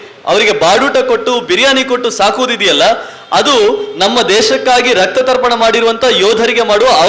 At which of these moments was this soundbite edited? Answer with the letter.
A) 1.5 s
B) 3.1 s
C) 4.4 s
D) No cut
D